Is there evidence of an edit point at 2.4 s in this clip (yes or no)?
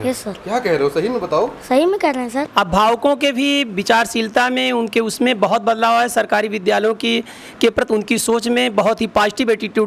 yes